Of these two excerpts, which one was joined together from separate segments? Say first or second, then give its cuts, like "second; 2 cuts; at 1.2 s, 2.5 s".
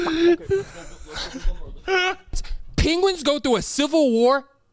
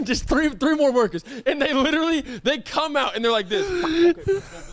first; 1 cut; at 2.5 s